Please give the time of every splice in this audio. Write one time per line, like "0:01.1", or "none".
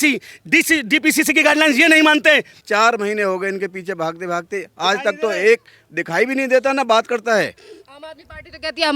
0:02.6